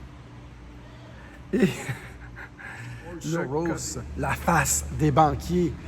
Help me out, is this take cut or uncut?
cut